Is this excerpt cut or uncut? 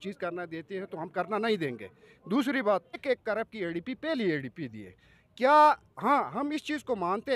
cut